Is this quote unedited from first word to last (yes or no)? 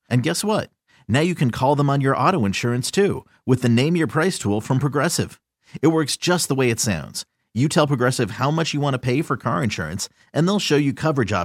yes